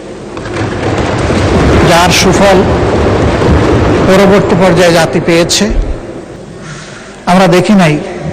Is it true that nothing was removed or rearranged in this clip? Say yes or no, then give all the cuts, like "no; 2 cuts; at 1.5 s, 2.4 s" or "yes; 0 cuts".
no; 1 cut; at 6.5 s